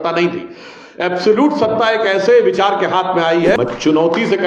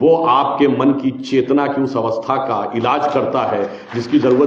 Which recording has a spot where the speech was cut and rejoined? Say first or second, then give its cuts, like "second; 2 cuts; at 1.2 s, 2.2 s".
first; 1 cut; at 3.6 s